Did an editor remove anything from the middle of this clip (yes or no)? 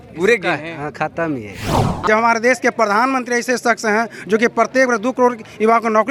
yes